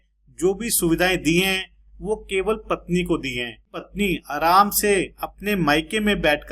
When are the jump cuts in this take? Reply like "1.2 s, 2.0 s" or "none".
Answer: 3.9 s